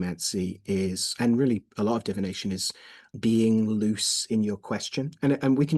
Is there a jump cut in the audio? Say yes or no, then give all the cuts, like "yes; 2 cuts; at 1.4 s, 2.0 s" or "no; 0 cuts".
yes; 1 cut; at 3.0 s